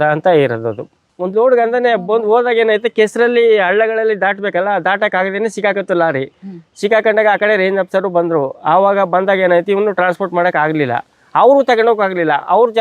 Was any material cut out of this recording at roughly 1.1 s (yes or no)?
yes